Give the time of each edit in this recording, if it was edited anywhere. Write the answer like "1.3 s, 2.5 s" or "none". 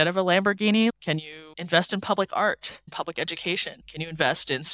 0.9 s, 2.9 s, 3.8 s

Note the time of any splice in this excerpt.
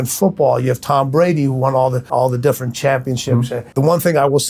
2.1 s, 3.6 s

